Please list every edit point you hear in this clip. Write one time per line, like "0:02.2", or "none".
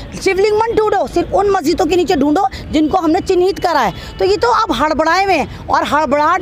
none